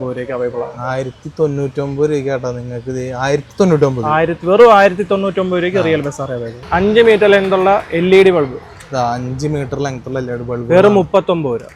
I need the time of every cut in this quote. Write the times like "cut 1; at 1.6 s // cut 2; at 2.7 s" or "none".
cut 1; at 6.5 s